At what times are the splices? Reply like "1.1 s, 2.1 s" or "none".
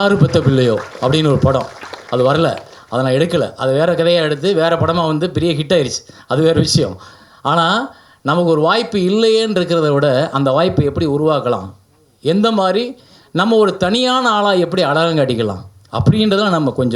none